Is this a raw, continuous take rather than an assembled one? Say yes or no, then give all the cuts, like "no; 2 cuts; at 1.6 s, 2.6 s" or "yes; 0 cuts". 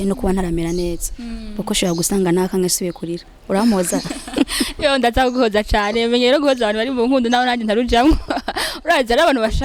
yes; 0 cuts